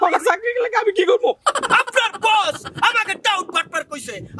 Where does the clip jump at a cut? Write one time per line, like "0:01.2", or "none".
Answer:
0:01.4